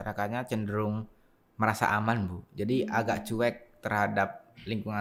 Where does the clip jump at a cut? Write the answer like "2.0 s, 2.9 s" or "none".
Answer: none